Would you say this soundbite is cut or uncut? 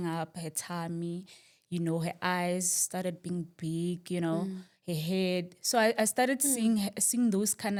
uncut